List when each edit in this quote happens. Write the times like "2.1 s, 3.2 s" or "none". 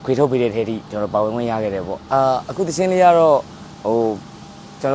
2.0 s